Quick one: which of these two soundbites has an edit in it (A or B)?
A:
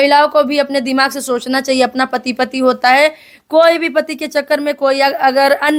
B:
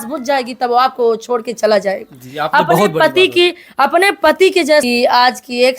B